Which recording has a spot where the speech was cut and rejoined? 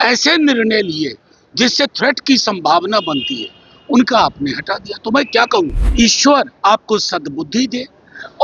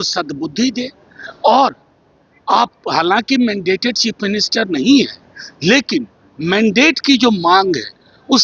first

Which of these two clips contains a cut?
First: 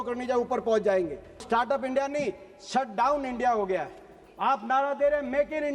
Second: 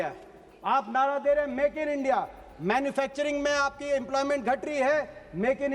first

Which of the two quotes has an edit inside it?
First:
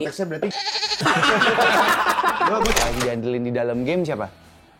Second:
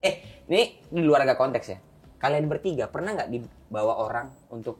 first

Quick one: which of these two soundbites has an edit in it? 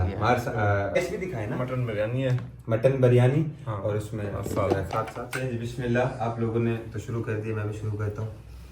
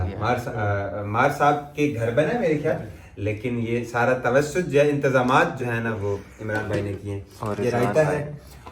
first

